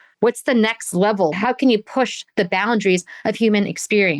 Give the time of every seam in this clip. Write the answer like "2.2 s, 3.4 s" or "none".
1.3 s